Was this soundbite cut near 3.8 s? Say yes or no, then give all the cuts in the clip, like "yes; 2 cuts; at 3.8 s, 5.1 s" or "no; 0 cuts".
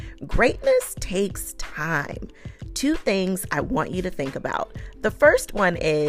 no; 0 cuts